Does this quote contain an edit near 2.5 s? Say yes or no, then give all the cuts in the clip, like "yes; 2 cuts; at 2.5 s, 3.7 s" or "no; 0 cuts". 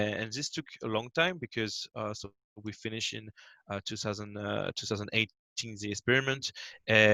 no; 0 cuts